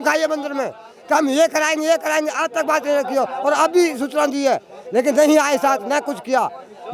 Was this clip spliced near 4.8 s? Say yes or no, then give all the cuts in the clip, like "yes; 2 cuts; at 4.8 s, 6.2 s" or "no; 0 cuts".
no; 0 cuts